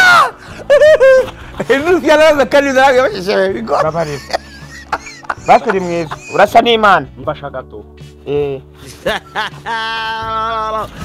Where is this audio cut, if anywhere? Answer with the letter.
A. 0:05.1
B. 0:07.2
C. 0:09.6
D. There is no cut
D